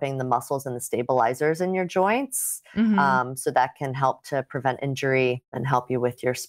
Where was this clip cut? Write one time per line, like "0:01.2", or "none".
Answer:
0:05.5